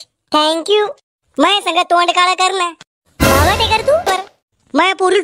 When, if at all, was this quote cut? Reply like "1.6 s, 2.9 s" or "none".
4.1 s